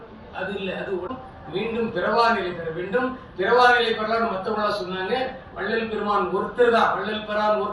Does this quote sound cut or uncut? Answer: cut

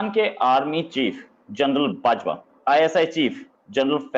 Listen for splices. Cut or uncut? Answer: cut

